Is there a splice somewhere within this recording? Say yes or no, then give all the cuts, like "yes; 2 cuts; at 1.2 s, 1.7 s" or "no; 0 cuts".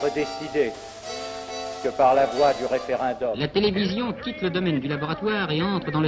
yes; 1 cut; at 3.4 s